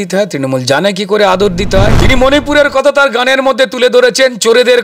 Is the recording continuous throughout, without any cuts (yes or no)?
no